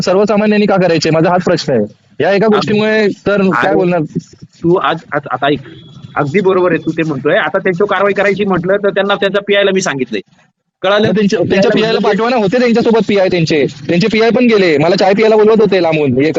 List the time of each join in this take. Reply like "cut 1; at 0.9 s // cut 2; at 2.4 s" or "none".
none